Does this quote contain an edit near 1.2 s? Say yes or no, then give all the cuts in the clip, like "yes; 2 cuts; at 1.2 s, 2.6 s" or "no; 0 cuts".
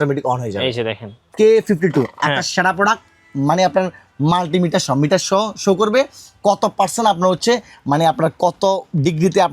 yes; 1 cut; at 1.2 s